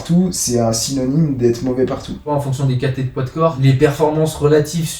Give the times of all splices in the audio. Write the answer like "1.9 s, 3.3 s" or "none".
2.3 s, 3.6 s